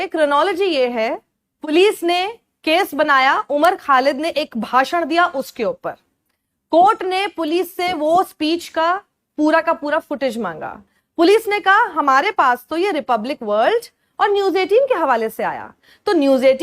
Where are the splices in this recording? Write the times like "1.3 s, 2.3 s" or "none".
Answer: 1.7 s